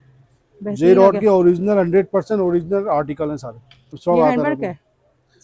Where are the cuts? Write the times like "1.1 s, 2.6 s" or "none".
4.0 s